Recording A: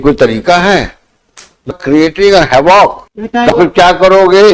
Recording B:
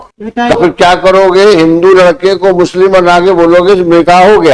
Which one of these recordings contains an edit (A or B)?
A